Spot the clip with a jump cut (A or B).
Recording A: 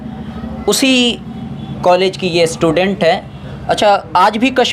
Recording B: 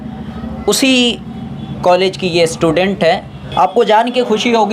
B